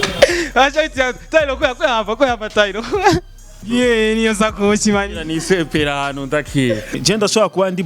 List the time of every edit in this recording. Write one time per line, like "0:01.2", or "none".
0:03.6
0:07.0

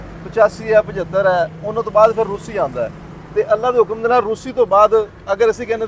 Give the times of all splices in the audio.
none

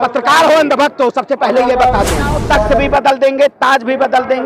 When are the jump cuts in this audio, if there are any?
0:02.4

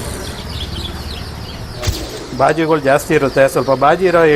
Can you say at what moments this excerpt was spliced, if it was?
0:01.9

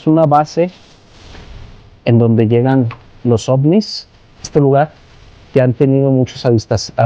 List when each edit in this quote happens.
0:04.5

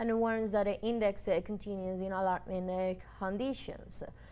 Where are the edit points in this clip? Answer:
none

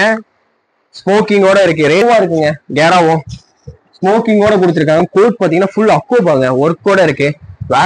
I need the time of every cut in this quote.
0:02.0

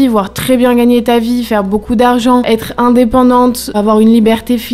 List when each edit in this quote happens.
0:02.5
0:03.7

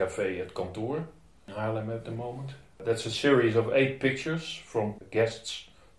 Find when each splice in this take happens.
0:01.4
0:02.8
0:05.0

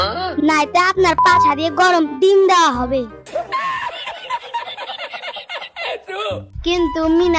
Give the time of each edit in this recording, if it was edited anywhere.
0:03.2

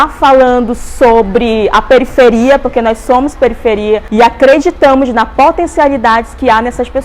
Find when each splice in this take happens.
0:04.1

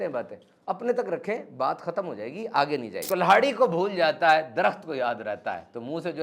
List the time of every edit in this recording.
0:02.9

